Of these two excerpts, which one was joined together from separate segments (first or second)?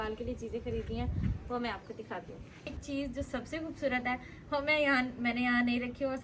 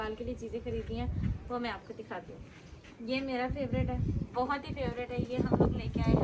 first